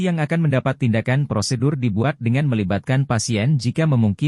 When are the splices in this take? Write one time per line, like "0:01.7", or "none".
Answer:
none